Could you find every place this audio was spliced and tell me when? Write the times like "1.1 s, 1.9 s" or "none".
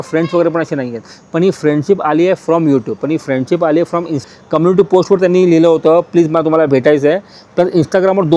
4.3 s